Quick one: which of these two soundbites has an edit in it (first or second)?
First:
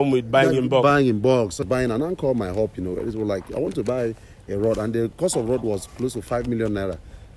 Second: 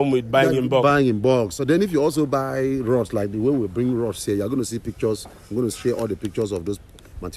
first